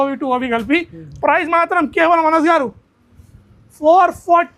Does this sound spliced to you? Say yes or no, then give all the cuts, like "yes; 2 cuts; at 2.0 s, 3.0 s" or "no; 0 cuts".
no; 0 cuts